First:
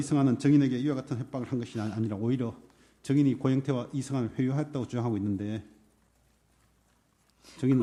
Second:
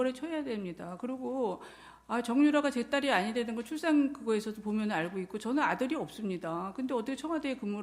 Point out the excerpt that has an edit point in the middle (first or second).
second